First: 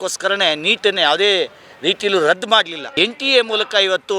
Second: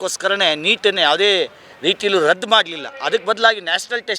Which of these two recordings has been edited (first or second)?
first